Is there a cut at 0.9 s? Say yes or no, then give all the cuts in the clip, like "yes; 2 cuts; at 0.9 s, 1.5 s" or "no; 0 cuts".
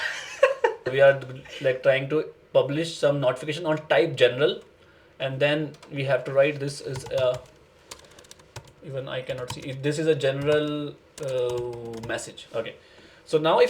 yes; 1 cut; at 0.9 s